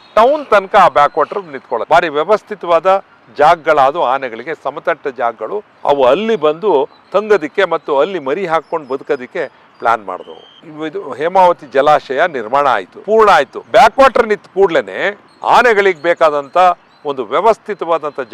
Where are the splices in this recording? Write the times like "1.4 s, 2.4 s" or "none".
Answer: 1.8 s, 5.7 s, 10.6 s